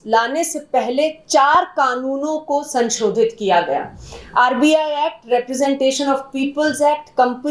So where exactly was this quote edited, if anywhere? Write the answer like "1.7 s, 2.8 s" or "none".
none